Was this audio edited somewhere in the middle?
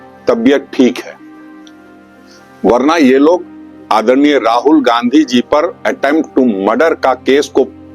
no; 0 cuts

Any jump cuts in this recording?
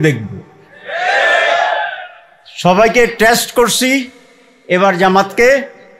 no; 0 cuts

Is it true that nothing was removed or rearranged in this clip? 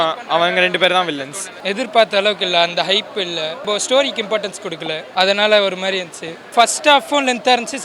no; 4 cuts; at 1.5 s, 3.6 s, 5.0 s, 6.5 s

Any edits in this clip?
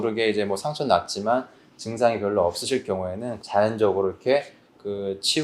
yes; 1 cut; at 3.3 s

